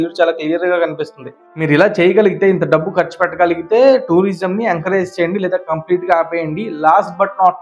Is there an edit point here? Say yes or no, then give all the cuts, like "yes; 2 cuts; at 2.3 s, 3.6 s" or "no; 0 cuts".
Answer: yes; 1 cut; at 1.5 s